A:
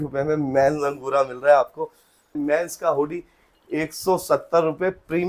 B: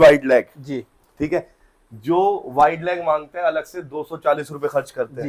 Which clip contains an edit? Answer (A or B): A